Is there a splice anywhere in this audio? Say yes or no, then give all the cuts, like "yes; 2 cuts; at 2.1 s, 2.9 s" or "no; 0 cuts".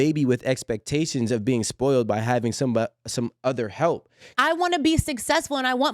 yes; 1 cut; at 4.3 s